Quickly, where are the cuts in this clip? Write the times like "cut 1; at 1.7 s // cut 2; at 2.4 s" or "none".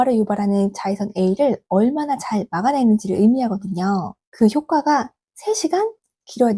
cut 1; at 4.2 s